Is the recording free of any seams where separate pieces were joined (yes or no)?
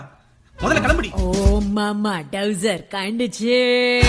yes